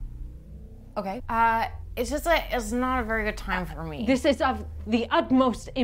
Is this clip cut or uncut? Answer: cut